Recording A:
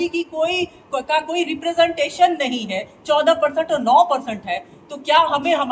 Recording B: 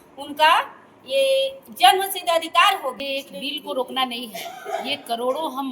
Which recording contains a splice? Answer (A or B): B